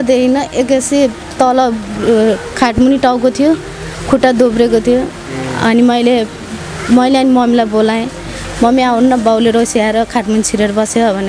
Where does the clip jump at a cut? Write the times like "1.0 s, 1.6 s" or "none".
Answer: none